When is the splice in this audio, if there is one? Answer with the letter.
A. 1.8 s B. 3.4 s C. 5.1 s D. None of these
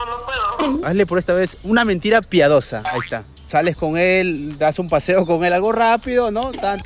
B